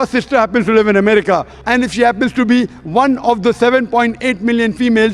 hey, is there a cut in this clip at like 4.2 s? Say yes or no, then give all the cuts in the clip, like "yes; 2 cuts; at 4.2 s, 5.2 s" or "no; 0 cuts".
no; 1 cut; at 1.5 s